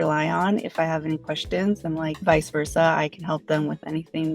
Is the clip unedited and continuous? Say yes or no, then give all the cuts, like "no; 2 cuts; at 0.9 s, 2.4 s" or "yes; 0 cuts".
no; 1 cut; at 2.2 s